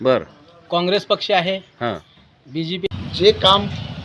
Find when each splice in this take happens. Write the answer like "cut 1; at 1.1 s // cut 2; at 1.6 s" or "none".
cut 1; at 2.9 s